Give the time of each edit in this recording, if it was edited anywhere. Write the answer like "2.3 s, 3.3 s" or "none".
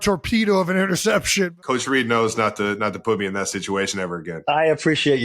1.5 s, 4.3 s